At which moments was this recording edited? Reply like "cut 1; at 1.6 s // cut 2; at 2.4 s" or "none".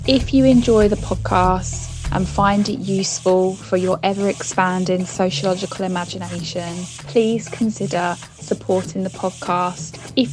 none